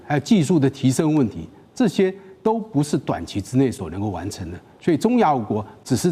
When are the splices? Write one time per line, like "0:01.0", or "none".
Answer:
none